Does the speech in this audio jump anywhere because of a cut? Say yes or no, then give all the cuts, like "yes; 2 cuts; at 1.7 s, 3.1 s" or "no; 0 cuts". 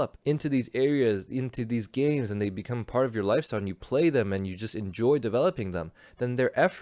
no; 0 cuts